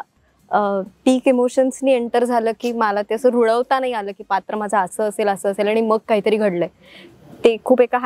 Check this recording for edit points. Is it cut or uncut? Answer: uncut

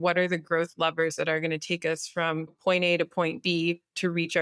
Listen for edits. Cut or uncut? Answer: cut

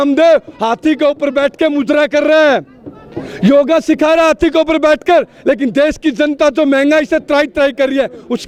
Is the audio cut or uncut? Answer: uncut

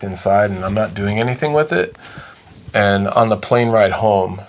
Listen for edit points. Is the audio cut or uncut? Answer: uncut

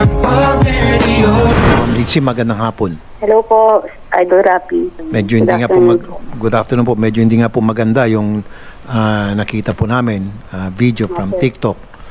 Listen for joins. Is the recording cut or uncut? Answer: uncut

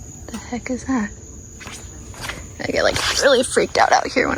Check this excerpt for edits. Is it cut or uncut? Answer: uncut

